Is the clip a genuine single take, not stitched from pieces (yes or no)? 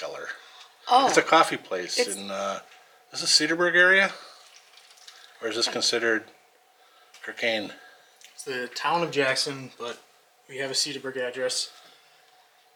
yes